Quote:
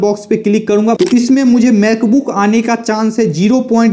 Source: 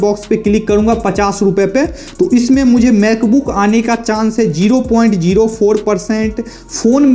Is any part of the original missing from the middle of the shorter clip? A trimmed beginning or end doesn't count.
yes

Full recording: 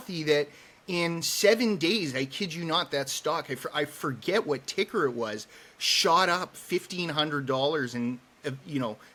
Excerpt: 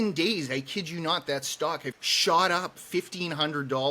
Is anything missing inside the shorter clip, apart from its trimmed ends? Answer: yes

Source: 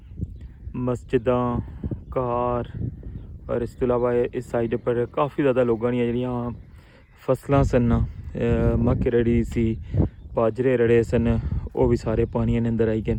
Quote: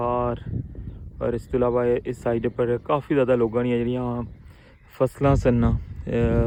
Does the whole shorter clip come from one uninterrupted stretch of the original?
yes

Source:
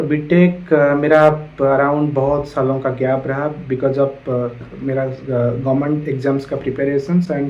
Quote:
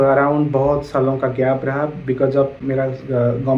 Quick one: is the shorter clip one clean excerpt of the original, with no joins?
no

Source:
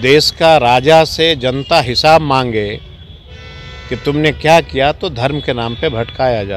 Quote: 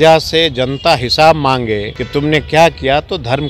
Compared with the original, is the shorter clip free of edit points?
no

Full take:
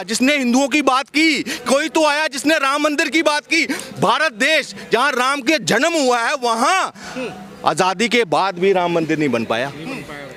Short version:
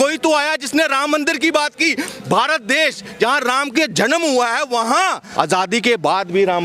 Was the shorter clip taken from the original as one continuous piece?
no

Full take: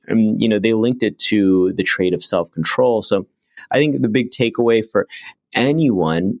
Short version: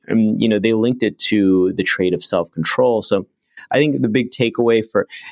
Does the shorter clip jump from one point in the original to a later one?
no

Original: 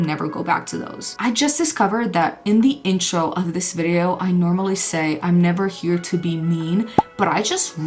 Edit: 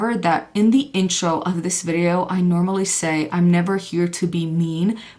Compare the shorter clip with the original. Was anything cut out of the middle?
no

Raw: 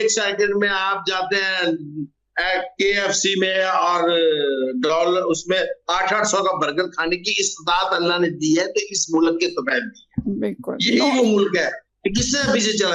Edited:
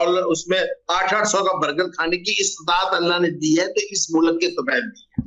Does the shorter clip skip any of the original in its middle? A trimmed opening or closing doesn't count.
no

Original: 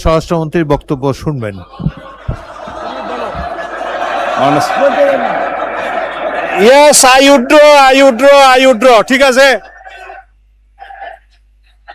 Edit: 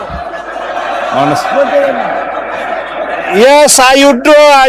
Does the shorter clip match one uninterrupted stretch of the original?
yes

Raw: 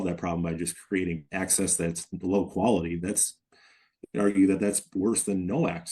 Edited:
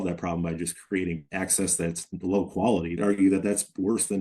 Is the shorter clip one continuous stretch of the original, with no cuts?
no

